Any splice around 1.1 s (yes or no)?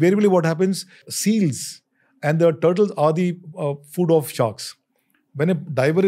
yes